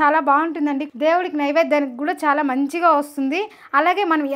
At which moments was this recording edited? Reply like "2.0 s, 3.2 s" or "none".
0.9 s